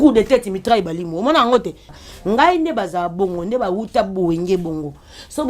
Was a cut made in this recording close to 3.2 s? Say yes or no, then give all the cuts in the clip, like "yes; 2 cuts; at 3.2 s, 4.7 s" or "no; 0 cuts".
no; 1 cut; at 1.9 s